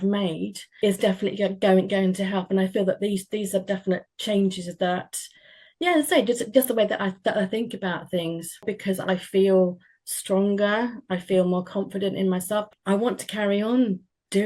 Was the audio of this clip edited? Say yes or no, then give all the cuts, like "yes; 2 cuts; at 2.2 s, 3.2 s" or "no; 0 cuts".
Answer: yes; 3 cuts; at 0.7 s, 8.7 s, 12.7 s